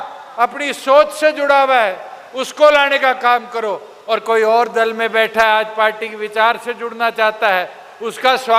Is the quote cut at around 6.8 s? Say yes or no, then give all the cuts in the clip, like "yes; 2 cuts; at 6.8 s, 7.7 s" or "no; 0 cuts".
no; 0 cuts